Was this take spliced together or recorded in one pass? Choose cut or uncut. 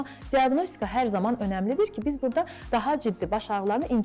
cut